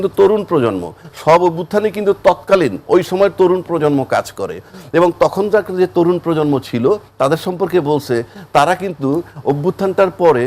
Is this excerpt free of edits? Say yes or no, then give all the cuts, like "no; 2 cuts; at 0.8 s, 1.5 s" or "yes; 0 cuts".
yes; 0 cuts